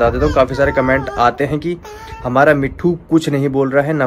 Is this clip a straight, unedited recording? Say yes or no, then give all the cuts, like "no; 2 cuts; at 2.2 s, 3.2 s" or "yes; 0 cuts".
yes; 0 cuts